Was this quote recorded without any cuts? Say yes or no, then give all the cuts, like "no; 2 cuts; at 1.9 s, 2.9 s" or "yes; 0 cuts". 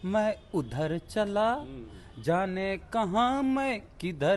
yes; 0 cuts